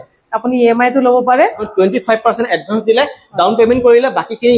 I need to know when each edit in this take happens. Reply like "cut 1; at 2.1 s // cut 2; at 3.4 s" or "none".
cut 1; at 1.5 s

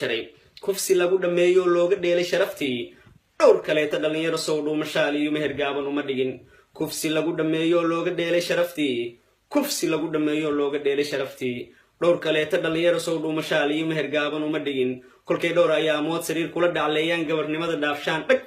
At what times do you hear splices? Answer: cut 1; at 9.5 s

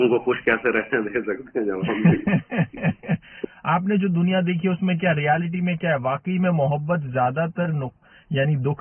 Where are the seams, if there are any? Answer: cut 1; at 3.4 s

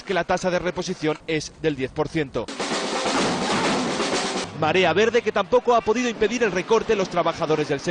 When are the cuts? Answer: none

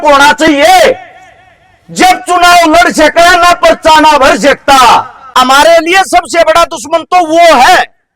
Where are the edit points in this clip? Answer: cut 1; at 5.2 s

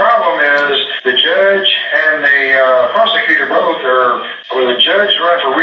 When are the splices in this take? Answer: cut 1; at 0.9 s // cut 2; at 4.3 s

